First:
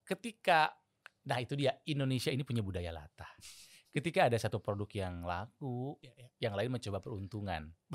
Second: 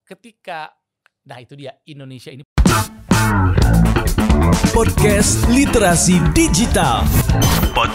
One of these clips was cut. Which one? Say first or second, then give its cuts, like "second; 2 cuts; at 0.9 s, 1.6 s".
second; 1 cut; at 2.5 s